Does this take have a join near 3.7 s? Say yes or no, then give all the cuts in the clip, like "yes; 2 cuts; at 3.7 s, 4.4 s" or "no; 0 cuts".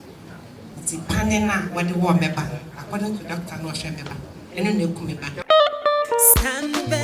no; 1 cut; at 5.3 s